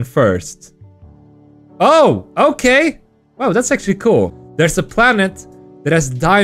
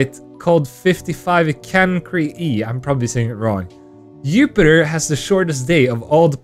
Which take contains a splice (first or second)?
first